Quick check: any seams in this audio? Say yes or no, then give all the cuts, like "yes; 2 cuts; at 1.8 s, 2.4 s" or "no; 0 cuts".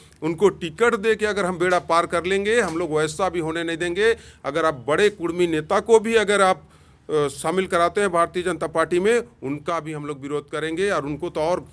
no; 0 cuts